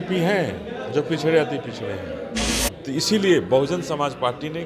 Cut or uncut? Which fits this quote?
cut